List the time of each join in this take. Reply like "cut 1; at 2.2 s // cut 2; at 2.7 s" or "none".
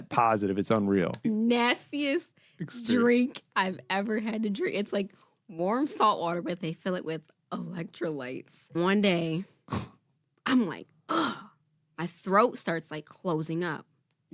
cut 1; at 1.2 s // cut 2; at 8.7 s